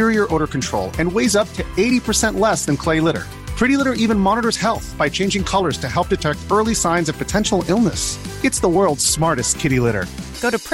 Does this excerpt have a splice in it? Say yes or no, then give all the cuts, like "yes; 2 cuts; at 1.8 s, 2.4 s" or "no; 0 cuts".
no; 0 cuts